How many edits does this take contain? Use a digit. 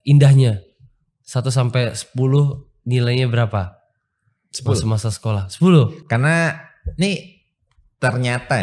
0